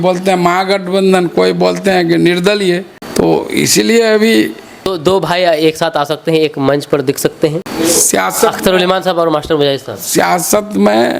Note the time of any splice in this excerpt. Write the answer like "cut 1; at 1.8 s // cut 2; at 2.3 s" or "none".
cut 1; at 3.0 s // cut 2; at 5.0 s // cut 3; at 7.7 s

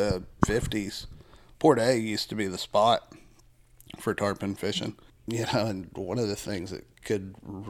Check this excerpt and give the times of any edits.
cut 1; at 5.0 s

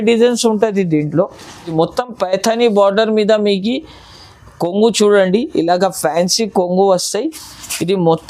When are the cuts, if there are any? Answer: cut 1; at 1.7 s

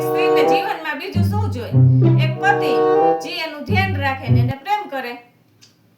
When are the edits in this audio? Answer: none

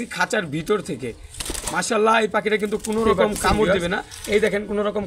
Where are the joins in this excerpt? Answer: cut 1; at 3.7 s

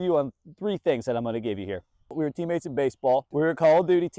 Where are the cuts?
cut 1; at 2.1 s // cut 2; at 3.3 s

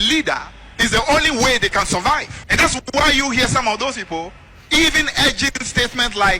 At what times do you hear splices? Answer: cut 1; at 2.4 s

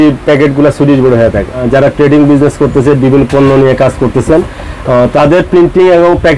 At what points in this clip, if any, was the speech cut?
cut 1; at 1.6 s

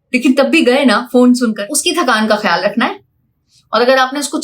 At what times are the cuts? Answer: cut 1; at 1.6 s

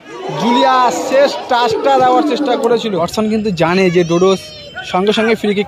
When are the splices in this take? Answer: cut 1; at 2.9 s

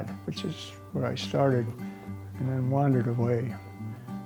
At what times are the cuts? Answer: none

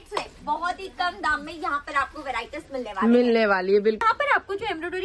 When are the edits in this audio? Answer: cut 1; at 4.0 s

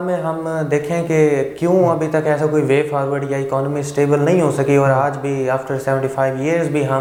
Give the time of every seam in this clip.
none

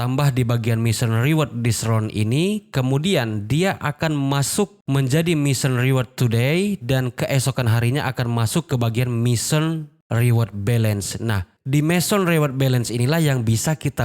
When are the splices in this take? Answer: cut 1; at 11.5 s

